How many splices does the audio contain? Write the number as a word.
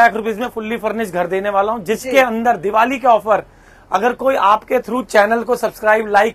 zero